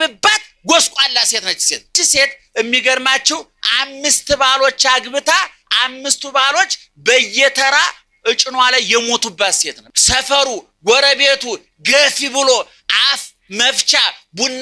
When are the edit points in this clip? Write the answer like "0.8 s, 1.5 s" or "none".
1.9 s, 9.8 s

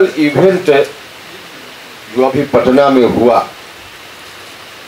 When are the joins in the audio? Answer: none

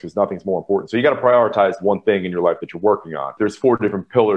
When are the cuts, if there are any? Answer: 3.3 s

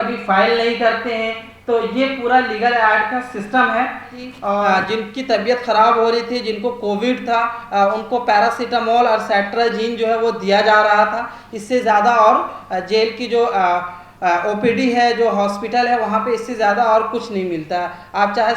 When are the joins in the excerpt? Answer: 4.6 s

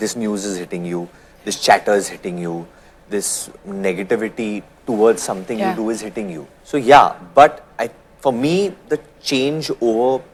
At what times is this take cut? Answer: none

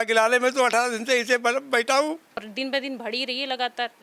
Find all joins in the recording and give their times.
2.4 s

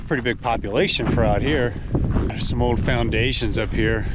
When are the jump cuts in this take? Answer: 2.4 s

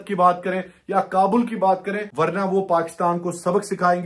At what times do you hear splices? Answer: 2.0 s

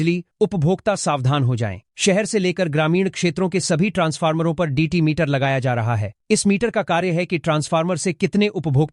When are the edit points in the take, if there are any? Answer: none

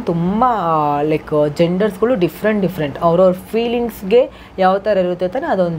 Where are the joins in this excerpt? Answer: none

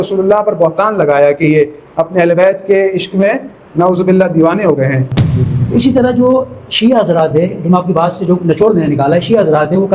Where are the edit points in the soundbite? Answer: 5.1 s

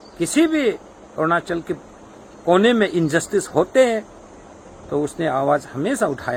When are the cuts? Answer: none

